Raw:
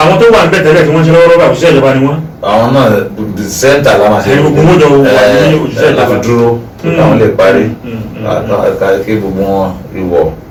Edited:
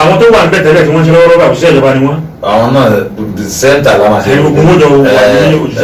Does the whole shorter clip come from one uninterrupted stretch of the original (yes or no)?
yes